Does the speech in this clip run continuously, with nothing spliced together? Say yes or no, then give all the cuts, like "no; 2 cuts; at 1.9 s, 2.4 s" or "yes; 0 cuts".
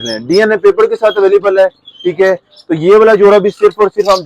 yes; 0 cuts